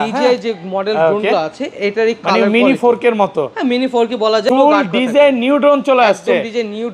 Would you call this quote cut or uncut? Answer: cut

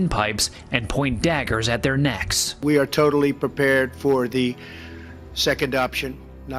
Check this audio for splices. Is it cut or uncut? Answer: cut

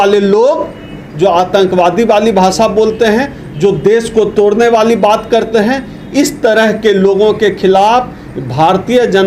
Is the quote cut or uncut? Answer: uncut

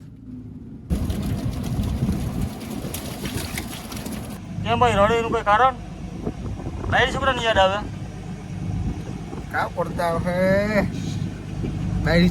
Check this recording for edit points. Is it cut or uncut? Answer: cut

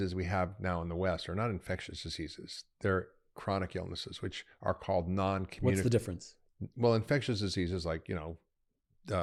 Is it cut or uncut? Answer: uncut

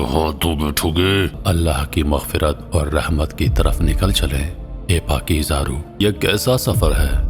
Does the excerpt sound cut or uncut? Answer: cut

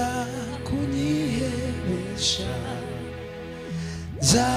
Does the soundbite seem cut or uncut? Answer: uncut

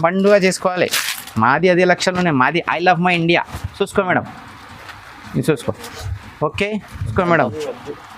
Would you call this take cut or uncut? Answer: cut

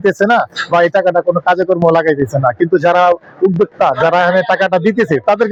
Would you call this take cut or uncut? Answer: uncut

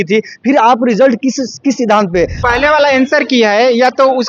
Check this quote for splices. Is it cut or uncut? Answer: cut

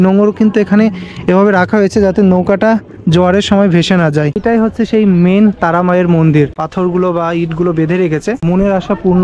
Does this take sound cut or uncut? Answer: cut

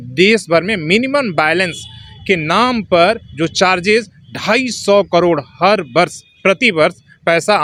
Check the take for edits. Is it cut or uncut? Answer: uncut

